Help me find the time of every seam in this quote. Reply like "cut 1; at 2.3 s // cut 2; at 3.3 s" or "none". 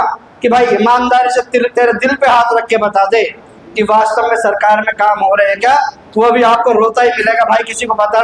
none